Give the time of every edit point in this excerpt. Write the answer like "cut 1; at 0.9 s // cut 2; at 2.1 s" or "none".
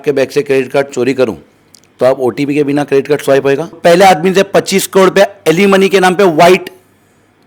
cut 1; at 3.8 s